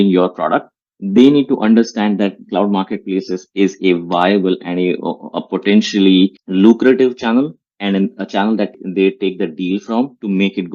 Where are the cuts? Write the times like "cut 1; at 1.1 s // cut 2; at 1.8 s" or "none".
cut 1; at 8.8 s